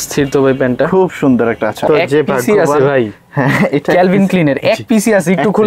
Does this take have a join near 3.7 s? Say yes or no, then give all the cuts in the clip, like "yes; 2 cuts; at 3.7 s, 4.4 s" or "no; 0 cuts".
no; 1 cut; at 1.8 s